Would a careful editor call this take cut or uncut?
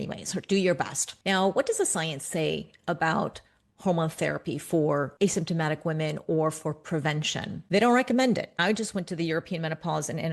cut